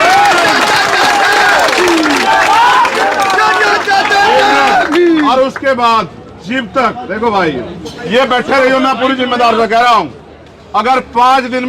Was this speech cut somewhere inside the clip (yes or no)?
yes